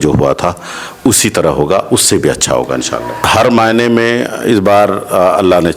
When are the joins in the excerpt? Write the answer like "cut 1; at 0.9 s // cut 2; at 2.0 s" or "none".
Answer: cut 1; at 3.2 s